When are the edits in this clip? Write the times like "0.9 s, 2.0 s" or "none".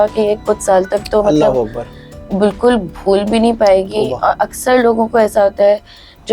none